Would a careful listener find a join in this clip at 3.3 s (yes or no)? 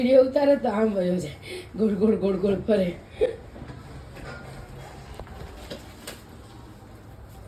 no